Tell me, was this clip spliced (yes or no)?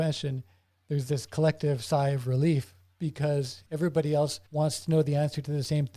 no